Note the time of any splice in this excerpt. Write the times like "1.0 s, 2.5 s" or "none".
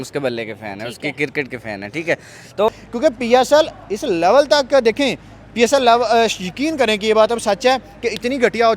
2.7 s